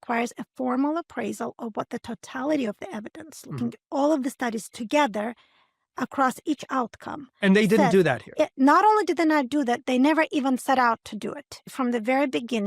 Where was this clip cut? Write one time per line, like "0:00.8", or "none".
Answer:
0:11.7